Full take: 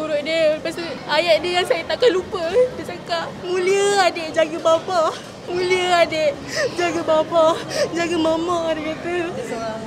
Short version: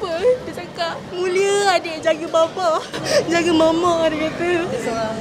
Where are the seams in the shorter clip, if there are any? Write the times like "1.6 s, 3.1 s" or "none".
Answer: 3.0 s